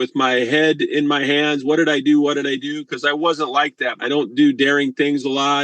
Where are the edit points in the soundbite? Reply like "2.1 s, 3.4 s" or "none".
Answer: 3.9 s